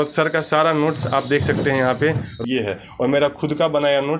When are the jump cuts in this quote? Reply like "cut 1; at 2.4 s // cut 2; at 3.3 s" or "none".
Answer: cut 1; at 2.3 s